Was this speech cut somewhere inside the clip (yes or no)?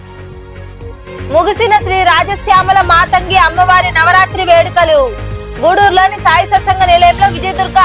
no